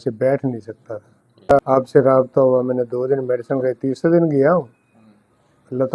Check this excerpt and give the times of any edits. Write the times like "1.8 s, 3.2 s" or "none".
1.6 s